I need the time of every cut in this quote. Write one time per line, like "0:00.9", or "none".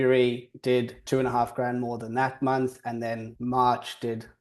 0:01.0
0:03.3